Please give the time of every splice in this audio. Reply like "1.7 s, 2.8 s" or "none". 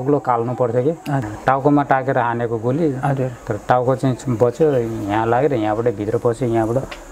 1.3 s